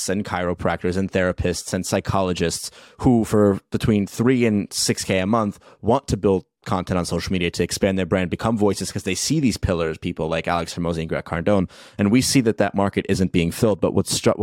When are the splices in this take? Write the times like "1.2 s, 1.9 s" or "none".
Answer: none